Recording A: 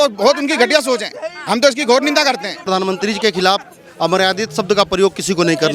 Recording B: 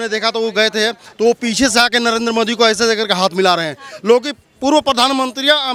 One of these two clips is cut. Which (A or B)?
A